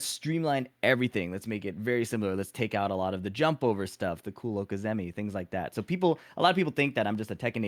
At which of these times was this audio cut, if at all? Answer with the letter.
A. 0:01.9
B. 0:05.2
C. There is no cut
C